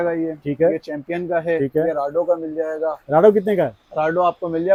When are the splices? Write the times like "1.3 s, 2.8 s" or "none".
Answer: none